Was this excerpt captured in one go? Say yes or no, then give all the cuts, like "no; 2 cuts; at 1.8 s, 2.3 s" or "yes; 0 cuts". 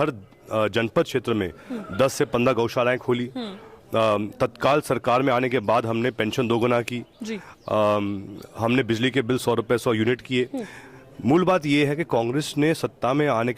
yes; 0 cuts